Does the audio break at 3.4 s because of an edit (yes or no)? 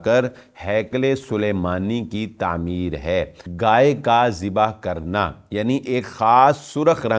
yes